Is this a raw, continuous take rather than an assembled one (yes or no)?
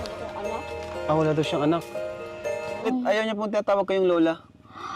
no